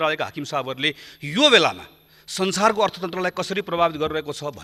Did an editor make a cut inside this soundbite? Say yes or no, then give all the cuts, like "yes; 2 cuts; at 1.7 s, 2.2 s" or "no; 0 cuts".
no; 0 cuts